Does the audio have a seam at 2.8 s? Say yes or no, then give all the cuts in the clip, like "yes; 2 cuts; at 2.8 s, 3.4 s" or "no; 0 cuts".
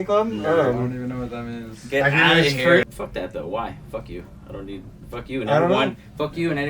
yes; 1 cut; at 2.8 s